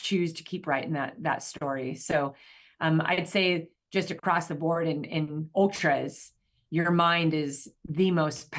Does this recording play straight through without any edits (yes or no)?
yes